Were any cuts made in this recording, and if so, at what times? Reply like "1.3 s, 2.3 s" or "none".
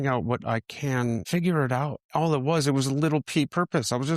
1.2 s, 2.0 s